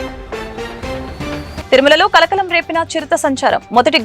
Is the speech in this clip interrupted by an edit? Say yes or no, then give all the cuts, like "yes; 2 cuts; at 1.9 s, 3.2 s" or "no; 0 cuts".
yes; 1 cut; at 1.6 s